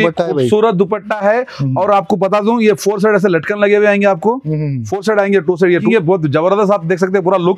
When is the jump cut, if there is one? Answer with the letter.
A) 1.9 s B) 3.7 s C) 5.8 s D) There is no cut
C